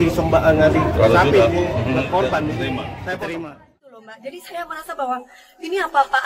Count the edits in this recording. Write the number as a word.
one